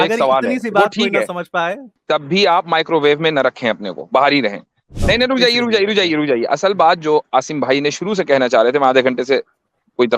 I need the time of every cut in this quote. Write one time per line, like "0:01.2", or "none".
0:01.9
0:04.9